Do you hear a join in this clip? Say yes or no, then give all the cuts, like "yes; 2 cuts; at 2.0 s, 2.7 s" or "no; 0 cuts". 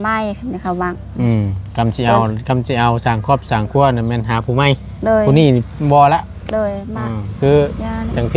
no; 0 cuts